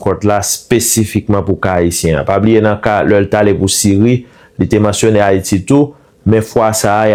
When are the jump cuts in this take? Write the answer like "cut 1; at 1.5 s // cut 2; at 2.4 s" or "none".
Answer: none